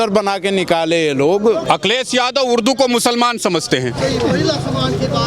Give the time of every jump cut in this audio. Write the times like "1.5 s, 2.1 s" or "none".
1.6 s